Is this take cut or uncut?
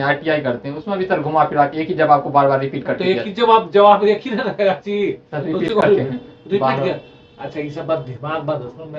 uncut